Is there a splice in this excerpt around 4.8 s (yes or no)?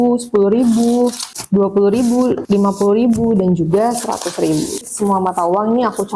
yes